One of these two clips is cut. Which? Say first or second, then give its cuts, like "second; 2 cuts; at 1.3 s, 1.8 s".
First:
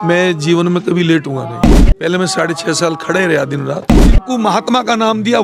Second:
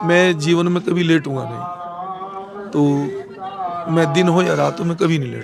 first; 2 cuts; at 1.6 s, 4.2 s